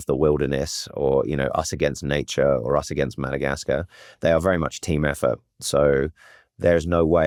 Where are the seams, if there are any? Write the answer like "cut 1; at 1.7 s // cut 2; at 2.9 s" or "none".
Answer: none